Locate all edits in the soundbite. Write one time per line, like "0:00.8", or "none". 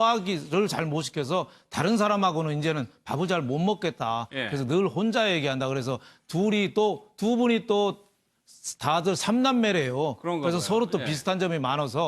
none